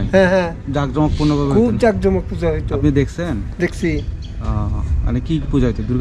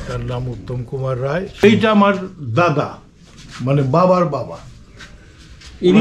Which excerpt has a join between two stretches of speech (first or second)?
second